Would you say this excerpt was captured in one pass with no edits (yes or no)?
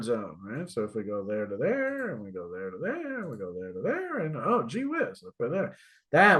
yes